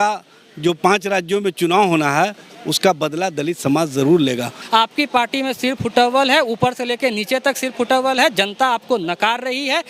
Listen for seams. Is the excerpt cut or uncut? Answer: cut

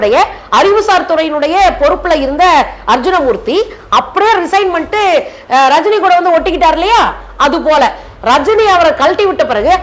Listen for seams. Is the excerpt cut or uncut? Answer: uncut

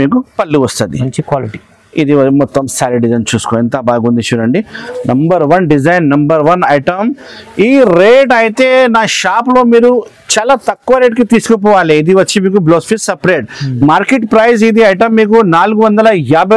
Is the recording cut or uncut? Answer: uncut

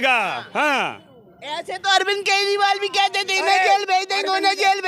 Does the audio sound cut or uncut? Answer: uncut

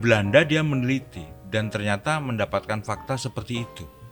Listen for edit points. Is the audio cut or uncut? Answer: uncut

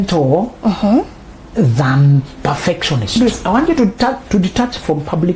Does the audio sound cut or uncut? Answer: cut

